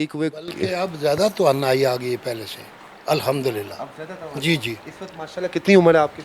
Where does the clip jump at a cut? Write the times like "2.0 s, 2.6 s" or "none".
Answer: none